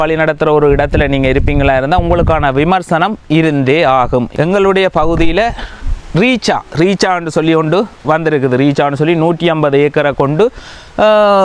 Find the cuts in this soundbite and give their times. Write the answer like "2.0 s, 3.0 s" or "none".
4.3 s